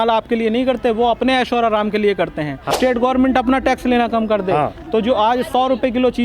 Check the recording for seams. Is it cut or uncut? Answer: cut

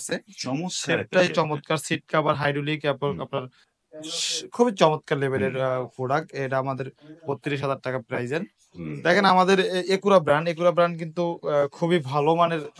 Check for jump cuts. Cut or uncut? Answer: uncut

